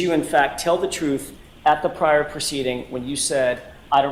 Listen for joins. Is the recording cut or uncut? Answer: uncut